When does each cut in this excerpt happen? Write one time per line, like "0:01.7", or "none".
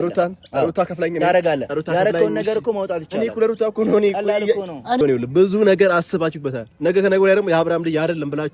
0:05.0